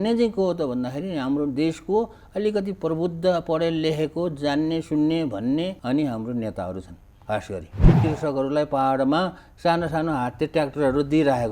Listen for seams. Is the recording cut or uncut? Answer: cut